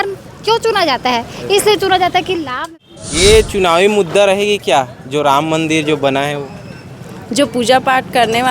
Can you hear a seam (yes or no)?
yes